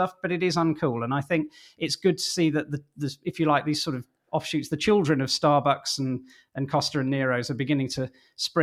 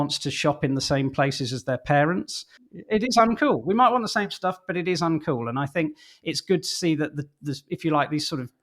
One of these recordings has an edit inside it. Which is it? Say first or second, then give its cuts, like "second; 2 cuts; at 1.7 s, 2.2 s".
second; 1 cut; at 2.9 s